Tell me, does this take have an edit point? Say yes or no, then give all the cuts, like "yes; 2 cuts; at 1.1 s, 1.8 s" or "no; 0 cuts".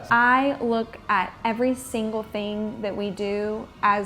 no; 0 cuts